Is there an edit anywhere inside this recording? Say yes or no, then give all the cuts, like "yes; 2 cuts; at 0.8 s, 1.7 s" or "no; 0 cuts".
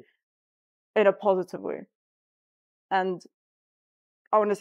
no; 0 cuts